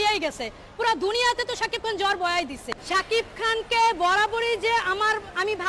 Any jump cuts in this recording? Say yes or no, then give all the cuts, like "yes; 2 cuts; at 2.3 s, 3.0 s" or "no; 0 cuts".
no; 0 cuts